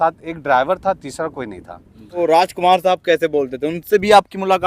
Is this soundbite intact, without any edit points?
no; 1 cut; at 2.2 s

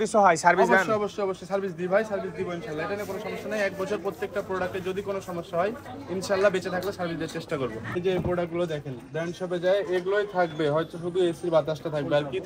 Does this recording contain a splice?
yes; 1 cut; at 7.9 s

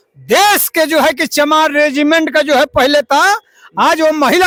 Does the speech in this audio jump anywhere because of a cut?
no; 0 cuts

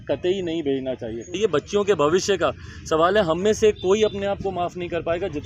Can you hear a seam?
yes; 1 cut; at 1.4 s

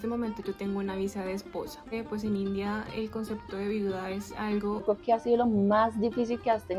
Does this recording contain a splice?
yes; 2 cuts; at 1.9 s, 4.8 s

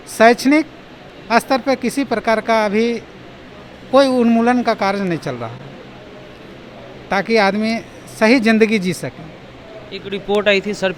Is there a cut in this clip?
no; 0 cuts

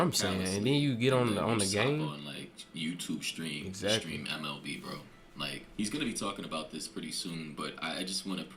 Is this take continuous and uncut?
yes; 0 cuts

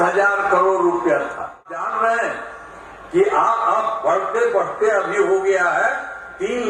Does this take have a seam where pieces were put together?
yes; 1 cut; at 1.9 s

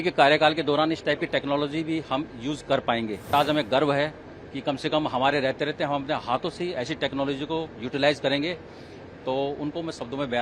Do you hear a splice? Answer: yes; 1 cut; at 3.3 s

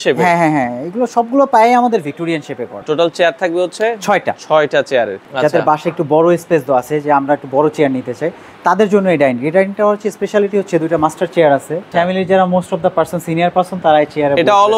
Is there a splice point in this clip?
yes; 3 cuts; at 2.8 s, 5.2 s, 11.9 s

